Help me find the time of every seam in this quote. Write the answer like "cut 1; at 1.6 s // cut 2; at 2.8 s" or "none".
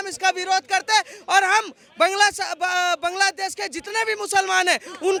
none